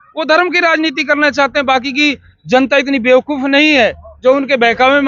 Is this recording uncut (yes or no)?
yes